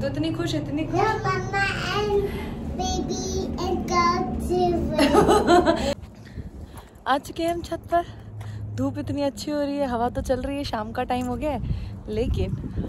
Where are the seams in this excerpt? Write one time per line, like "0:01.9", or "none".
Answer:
none